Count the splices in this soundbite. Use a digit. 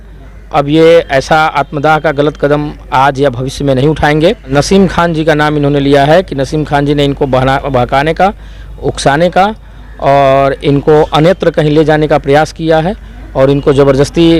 1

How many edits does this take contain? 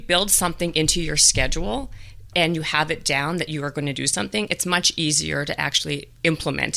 0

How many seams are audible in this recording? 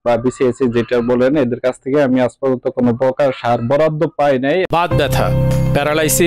0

